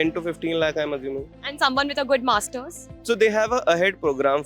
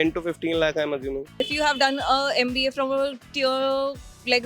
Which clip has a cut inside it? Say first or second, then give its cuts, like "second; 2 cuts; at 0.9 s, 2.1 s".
second; 1 cut; at 1.3 s